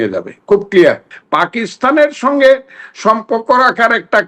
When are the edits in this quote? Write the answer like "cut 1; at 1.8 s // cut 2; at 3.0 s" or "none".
cut 1; at 1.1 s